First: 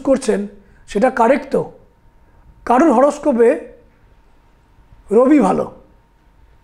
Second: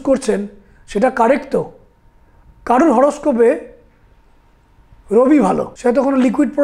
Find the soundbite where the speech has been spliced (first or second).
second